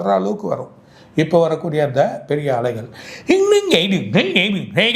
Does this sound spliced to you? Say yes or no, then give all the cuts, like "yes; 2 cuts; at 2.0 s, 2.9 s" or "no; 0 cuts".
no; 0 cuts